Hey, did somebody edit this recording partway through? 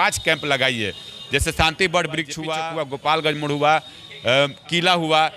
yes; 1 cut; at 2.4 s

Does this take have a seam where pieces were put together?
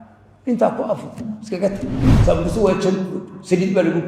yes; 1 cut; at 2.1 s

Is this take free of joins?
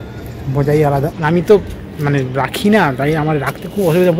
no; 1 cut; at 1.2 s

